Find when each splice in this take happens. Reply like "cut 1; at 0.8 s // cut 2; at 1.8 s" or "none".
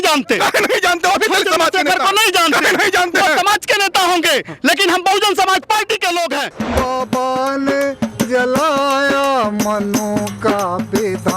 cut 1; at 6.6 s